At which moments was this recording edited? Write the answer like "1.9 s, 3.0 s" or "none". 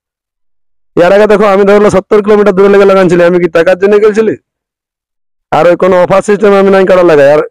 none